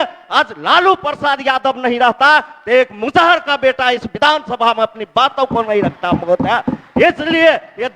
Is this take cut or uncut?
uncut